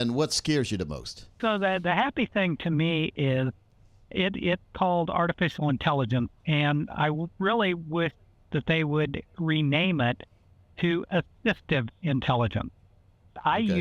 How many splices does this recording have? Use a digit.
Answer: 1